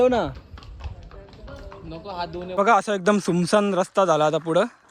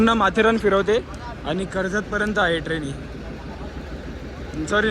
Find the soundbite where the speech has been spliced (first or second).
first